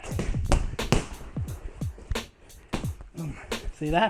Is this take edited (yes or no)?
no